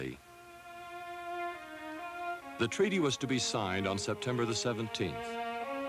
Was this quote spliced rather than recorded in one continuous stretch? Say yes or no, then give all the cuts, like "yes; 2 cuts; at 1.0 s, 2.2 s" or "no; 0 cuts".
no; 0 cuts